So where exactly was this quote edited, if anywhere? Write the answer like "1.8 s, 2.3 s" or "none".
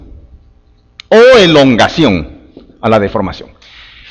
2.2 s